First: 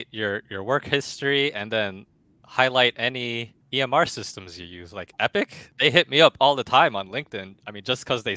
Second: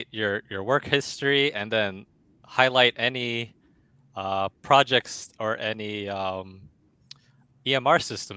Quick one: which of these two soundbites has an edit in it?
first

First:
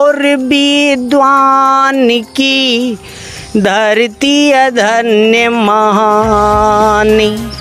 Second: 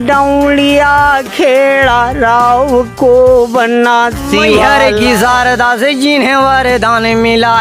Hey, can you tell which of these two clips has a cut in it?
second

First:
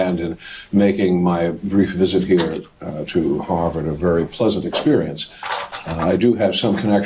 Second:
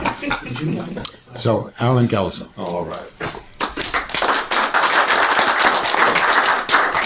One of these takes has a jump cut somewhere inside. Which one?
second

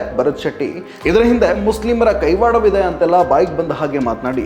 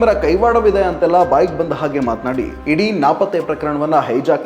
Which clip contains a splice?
first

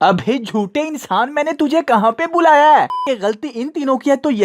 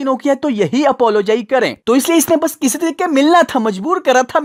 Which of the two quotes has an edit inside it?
first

